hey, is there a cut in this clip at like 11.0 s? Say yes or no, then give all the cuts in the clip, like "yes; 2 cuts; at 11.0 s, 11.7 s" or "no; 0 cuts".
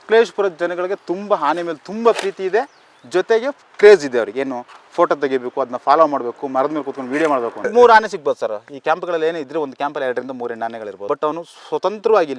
yes; 2 cuts; at 7.6 s, 11.0 s